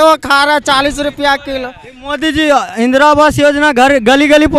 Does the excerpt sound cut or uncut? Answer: uncut